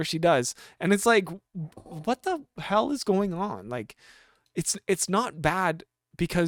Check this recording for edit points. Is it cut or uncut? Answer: uncut